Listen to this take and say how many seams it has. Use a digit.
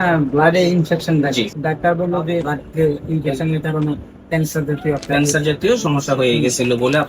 2